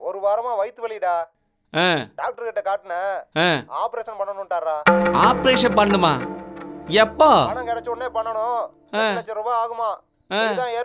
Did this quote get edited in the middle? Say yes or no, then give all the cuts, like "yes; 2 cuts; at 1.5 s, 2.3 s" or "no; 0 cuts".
no; 0 cuts